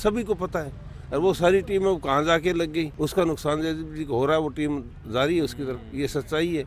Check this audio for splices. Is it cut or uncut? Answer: cut